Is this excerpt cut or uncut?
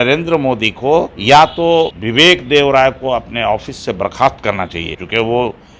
cut